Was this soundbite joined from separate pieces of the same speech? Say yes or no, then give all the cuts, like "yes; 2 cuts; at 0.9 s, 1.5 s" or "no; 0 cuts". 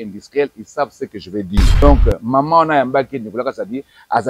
yes; 1 cut; at 1.7 s